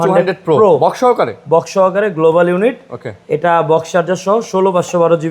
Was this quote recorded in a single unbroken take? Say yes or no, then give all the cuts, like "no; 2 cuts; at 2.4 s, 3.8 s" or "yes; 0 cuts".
yes; 0 cuts